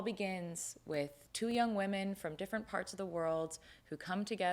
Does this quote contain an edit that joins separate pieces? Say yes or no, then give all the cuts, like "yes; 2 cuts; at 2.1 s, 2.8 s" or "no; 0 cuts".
yes; 1 cut; at 1.2 s